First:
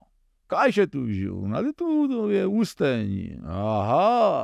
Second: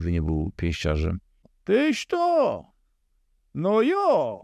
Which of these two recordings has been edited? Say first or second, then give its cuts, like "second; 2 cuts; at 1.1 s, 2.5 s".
second; 1 cut; at 1.5 s